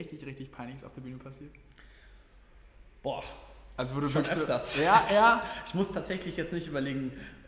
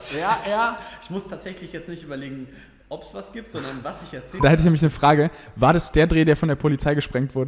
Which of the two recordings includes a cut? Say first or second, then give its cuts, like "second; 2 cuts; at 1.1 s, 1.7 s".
second; 1 cut; at 4.4 s